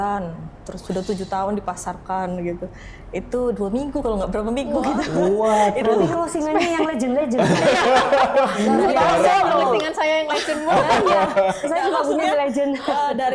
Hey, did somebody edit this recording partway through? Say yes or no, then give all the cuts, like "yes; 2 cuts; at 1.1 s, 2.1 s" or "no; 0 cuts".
no; 0 cuts